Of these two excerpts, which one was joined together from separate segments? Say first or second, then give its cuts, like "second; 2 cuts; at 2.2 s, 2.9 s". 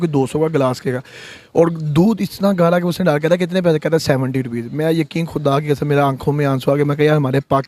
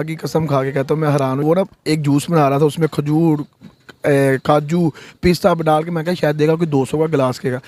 second; 1 cut; at 1.4 s